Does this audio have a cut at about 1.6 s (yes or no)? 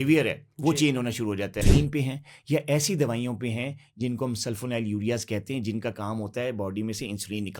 yes